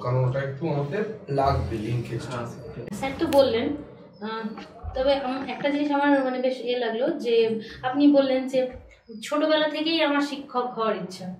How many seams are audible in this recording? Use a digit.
1